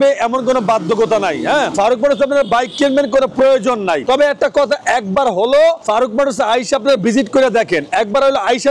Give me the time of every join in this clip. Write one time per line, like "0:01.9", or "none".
none